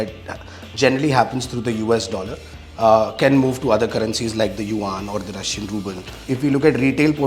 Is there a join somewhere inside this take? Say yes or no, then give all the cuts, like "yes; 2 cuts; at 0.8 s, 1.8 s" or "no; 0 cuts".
yes; 1 cut; at 6.2 s